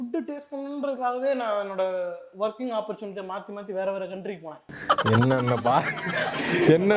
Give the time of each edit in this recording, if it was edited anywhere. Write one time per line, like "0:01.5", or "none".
none